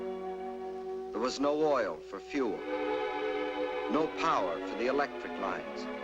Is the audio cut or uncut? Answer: cut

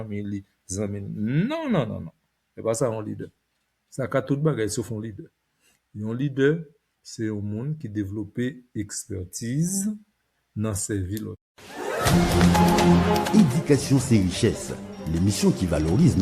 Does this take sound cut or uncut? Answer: cut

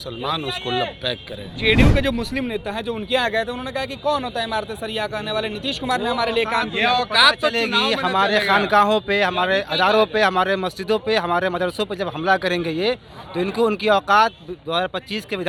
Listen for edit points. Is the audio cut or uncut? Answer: uncut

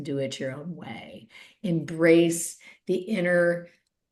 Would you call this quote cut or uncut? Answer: uncut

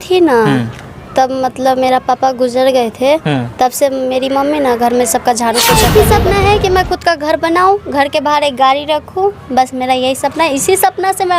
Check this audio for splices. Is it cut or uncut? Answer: cut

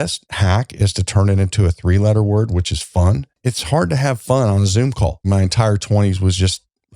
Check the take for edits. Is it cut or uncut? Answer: cut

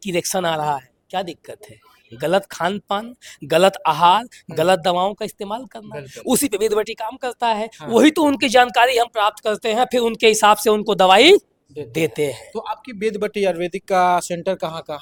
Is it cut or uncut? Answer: uncut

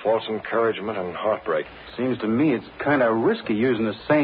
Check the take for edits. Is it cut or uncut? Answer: cut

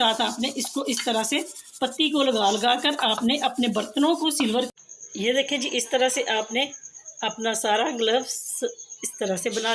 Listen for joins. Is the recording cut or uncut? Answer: cut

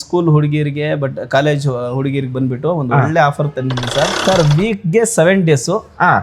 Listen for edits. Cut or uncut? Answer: cut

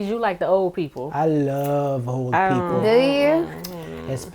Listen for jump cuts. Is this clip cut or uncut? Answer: uncut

